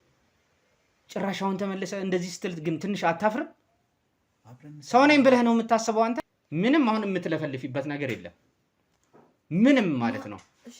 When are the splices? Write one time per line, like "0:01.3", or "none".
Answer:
0:06.3